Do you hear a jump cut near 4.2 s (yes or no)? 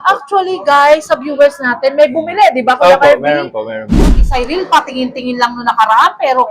yes